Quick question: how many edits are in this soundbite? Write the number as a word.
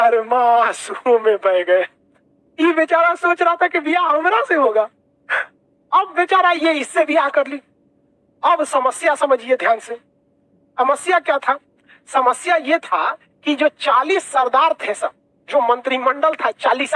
zero